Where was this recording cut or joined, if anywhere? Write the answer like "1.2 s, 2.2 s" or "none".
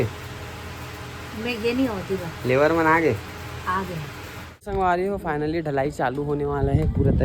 4.8 s